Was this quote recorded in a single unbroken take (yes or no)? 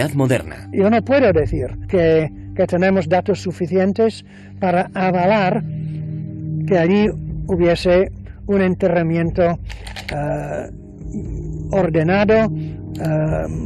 no